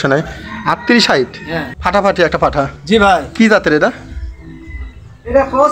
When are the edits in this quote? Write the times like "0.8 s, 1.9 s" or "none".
1.7 s